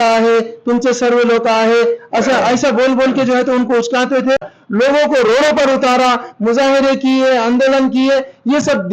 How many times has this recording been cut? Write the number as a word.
one